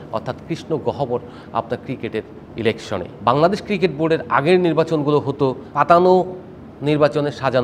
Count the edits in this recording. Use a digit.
1